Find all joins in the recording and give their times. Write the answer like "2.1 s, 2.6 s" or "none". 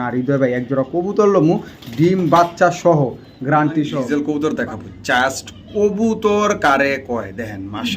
4.0 s